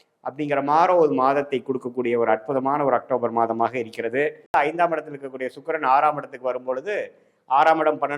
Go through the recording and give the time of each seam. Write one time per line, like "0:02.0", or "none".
0:04.5